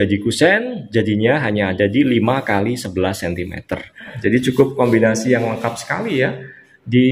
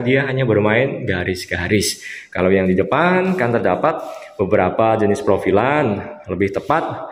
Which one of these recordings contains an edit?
first; 1 cut; at 4.1 s

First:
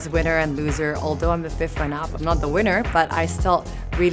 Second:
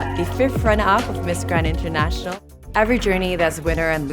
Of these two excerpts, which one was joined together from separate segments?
second; 1 cut; at 2.6 s

